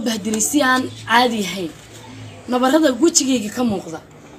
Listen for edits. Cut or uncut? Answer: uncut